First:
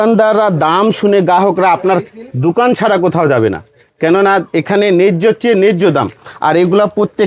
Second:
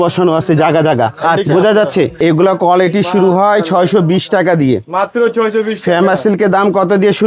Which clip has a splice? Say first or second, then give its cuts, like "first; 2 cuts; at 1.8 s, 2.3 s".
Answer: second; 1 cut; at 2.1 s